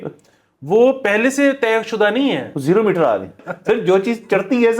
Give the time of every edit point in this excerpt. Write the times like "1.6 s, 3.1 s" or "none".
3.5 s